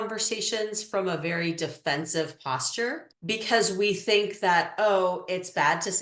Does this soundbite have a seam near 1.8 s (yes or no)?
no